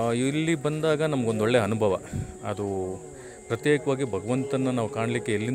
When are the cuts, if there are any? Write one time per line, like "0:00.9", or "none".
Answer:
none